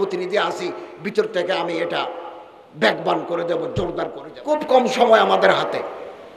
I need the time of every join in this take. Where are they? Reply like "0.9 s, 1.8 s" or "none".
4.3 s